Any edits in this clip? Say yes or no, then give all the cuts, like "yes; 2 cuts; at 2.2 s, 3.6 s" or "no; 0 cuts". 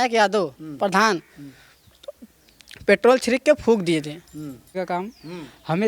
yes; 1 cut; at 4.8 s